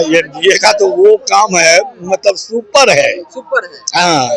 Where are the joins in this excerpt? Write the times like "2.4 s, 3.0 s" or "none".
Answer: none